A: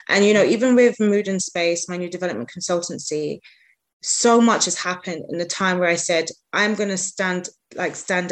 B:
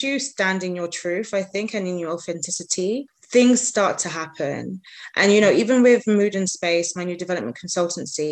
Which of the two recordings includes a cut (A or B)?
B